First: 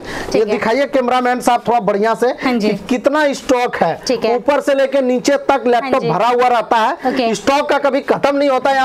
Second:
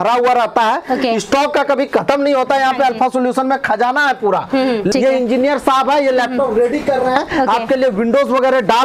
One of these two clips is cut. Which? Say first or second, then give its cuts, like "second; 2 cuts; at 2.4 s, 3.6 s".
second; 1 cut; at 4.9 s